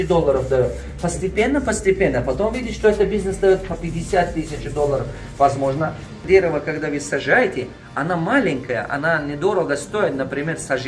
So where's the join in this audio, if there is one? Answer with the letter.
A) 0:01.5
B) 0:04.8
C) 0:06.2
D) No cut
C